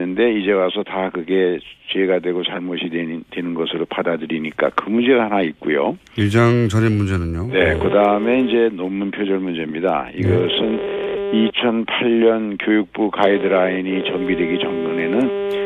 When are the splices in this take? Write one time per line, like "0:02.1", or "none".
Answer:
none